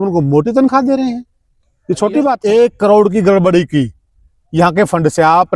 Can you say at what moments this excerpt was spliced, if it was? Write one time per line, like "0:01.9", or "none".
0:02.4

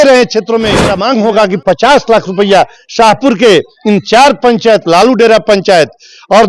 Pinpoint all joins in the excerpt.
0:00.9

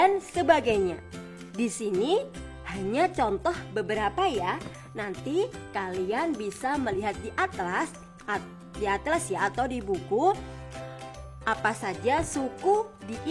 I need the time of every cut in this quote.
none

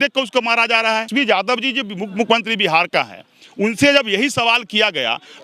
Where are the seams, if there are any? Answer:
0:01.1

